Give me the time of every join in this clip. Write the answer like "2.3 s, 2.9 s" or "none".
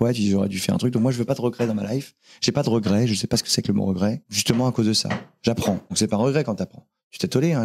4.3 s, 5.9 s